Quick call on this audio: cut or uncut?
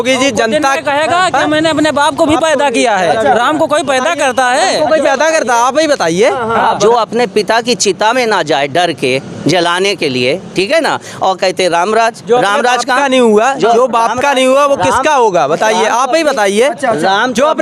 cut